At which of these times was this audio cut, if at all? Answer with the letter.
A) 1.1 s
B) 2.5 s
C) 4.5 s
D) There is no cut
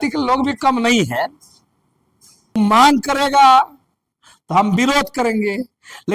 B